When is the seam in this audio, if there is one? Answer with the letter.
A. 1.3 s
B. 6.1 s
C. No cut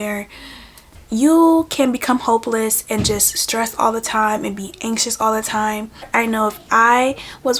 B